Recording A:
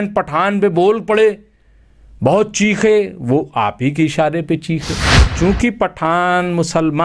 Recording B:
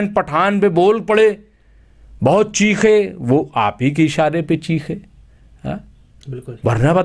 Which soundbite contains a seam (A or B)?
A